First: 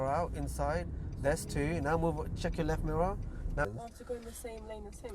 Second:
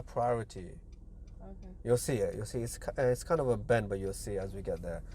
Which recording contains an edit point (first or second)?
first